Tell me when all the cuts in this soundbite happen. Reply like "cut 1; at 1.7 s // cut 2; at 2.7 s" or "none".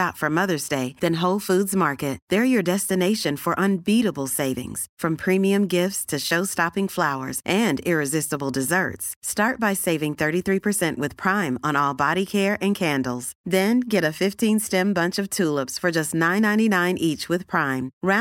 none